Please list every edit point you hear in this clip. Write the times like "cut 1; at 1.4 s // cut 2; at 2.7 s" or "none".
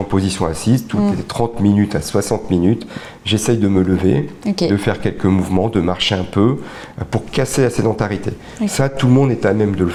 none

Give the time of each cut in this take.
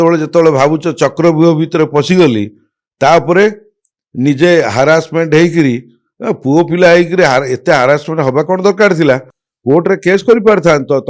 none

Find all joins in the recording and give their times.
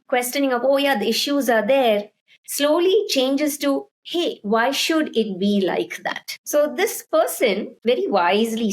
cut 1; at 6.3 s // cut 2; at 7.7 s

